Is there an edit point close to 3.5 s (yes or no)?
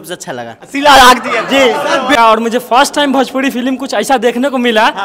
no